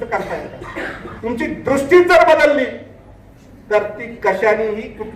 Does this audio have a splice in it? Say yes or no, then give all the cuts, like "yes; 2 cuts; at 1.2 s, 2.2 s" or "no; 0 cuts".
yes; 1 cut; at 1.1 s